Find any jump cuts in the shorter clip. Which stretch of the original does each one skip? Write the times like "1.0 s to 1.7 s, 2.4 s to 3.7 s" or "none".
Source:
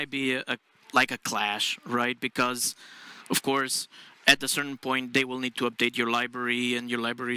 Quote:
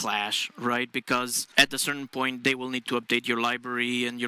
2.7 s to 4.1 s